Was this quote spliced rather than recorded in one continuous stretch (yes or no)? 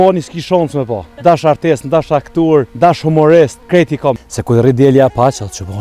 yes